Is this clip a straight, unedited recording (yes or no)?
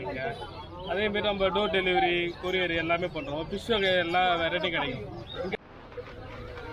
no